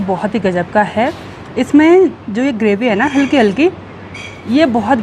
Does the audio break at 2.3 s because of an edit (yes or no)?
no